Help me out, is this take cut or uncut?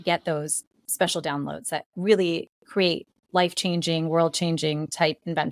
uncut